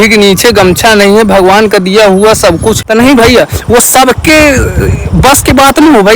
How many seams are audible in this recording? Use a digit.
1